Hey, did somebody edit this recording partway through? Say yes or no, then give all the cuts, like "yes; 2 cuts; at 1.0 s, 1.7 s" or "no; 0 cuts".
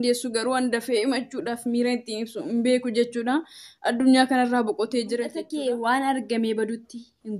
yes; 1 cut; at 5.4 s